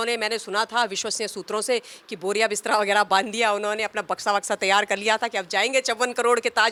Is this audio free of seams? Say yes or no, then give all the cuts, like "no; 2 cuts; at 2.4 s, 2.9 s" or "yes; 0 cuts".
yes; 0 cuts